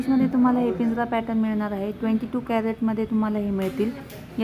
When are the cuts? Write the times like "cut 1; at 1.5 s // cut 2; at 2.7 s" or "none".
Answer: none